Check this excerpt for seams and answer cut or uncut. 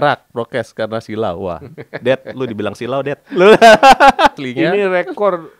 cut